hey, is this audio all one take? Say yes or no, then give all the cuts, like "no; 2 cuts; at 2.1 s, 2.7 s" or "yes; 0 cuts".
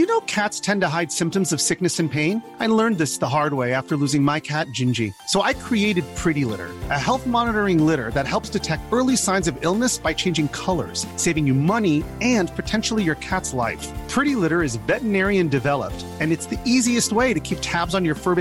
yes; 0 cuts